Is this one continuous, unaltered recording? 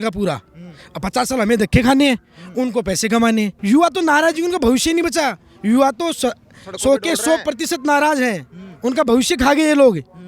no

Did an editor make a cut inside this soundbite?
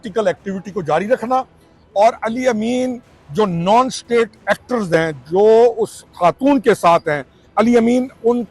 no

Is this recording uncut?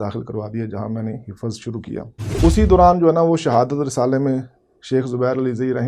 no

